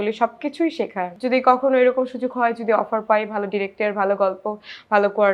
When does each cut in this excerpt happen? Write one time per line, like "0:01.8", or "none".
0:01.1